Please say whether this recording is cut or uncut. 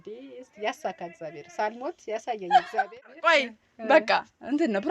cut